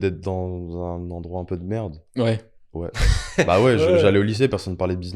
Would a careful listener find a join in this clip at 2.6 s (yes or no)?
no